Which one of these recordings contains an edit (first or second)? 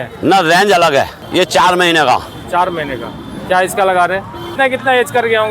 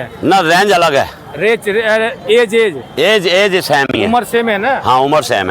first